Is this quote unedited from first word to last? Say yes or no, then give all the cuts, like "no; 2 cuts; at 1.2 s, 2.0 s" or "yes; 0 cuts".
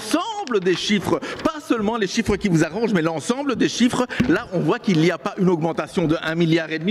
yes; 0 cuts